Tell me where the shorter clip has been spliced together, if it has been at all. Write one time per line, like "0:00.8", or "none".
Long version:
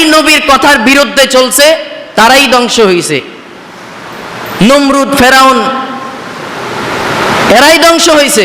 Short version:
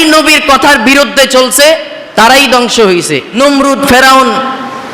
0:03.4